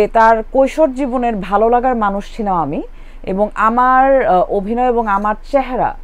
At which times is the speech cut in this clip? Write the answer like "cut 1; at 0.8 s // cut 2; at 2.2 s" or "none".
none